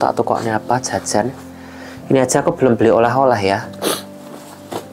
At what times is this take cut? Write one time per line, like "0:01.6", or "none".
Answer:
none